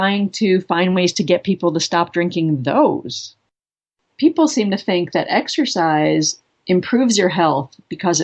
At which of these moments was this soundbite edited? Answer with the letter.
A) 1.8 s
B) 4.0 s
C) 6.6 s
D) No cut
B